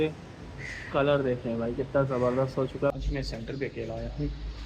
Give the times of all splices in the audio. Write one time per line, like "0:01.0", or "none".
0:02.9

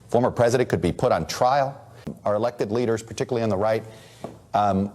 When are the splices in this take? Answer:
0:02.1

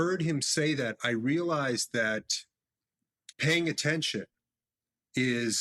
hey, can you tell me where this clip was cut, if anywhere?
none

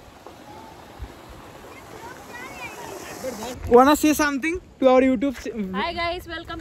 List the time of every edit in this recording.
0:03.6

